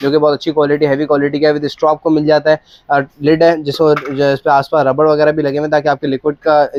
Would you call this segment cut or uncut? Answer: uncut